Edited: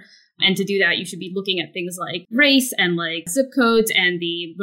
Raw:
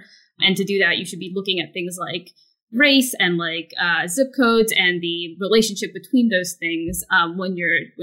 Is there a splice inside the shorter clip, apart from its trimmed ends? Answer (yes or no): yes